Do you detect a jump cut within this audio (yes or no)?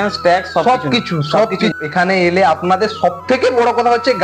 yes